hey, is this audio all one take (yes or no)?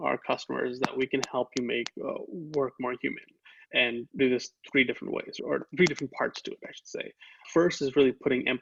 yes